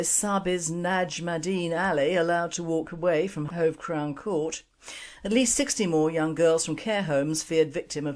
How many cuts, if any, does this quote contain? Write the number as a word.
one